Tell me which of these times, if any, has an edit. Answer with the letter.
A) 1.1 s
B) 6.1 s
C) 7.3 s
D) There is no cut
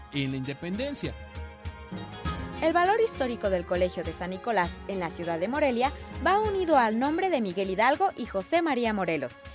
B